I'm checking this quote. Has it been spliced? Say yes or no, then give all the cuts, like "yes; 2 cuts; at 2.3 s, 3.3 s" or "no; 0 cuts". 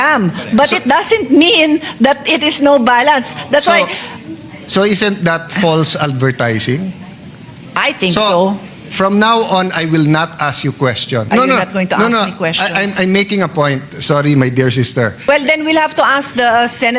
yes; 2 cuts; at 11.3 s, 15.2 s